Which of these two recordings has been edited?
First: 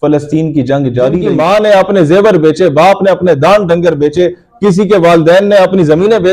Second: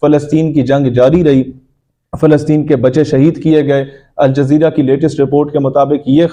first; 1 cut; at 1.3 s

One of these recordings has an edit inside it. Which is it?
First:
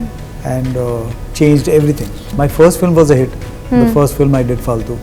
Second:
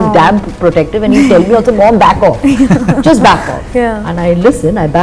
first; 1 cut; at 2.3 s

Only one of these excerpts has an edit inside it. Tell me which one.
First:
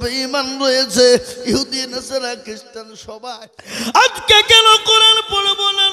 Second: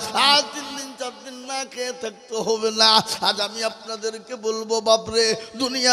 first; 1 cut; at 3.0 s

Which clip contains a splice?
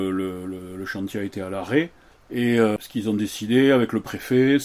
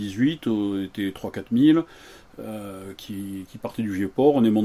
first; 1 cut; at 2.8 s

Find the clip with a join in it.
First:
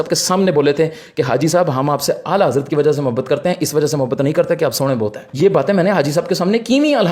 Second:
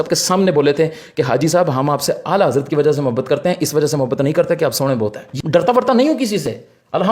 second; 1 cut; at 5.2 s

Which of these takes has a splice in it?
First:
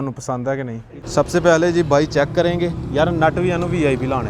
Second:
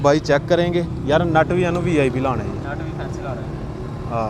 first; 1 cut; at 0.9 s

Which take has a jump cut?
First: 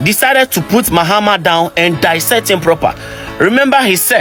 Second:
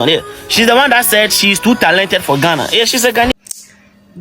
second; 1 cut; at 3.3 s

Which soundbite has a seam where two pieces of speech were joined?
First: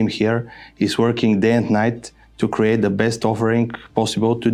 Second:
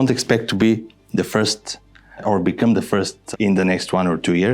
second; 2 cuts; at 2.2 s, 3.2 s

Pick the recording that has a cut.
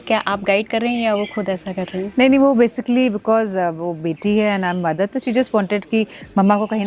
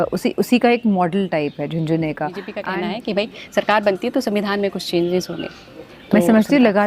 second; 1 cut; at 2.7 s

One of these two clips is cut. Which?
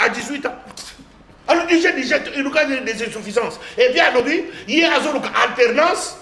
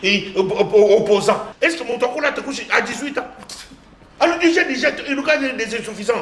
second; 1 cut; at 1.6 s

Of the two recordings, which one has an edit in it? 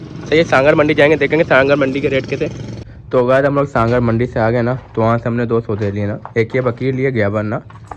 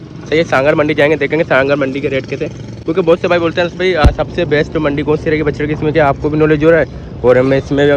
first; 1 cut; at 2.7 s

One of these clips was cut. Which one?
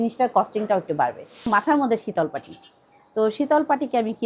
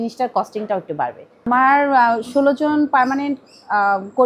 first; 1 cut; at 1.3 s

